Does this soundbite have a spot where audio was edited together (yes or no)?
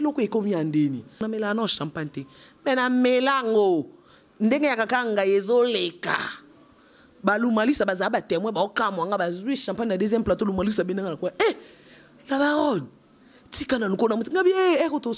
yes